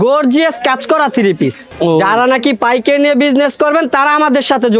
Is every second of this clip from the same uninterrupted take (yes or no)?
no